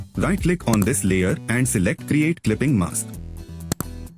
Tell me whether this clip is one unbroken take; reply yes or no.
no